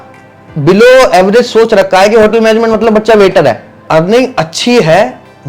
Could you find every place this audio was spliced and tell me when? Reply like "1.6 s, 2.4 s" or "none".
3.7 s